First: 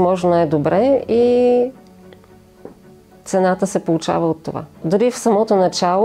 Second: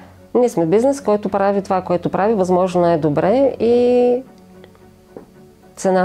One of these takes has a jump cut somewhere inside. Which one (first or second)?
first